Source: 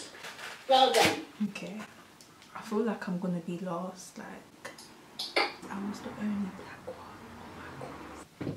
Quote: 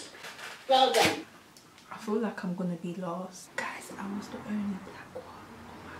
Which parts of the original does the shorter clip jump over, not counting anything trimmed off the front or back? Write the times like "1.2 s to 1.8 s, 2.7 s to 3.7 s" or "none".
1.3 s to 1.9 s, 4.5 s to 5.6 s